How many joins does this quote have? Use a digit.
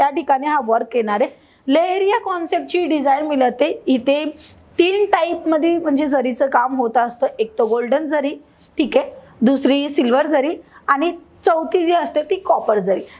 0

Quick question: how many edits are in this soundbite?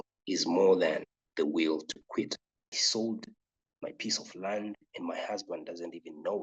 1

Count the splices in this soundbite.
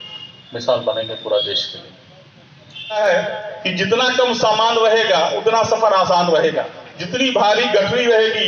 1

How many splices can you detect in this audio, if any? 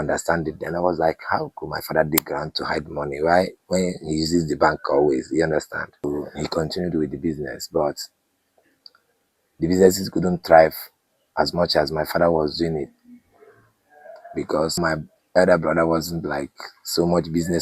2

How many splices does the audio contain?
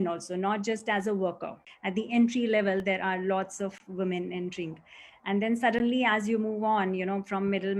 1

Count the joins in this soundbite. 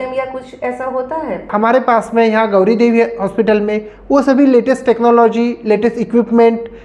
1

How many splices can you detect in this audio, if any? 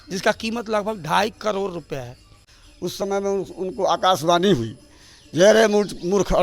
1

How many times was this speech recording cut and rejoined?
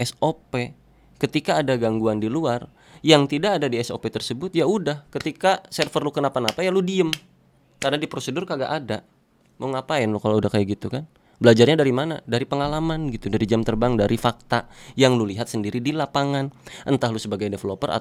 0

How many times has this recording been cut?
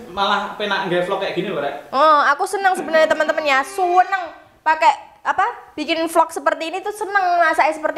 0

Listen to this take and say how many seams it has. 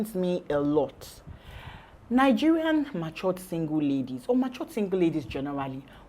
0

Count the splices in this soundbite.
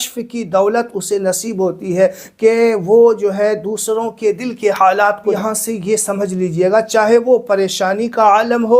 1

